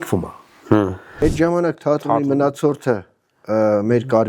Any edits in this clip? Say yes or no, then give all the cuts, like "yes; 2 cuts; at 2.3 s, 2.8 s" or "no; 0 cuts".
yes; 1 cut; at 1.0 s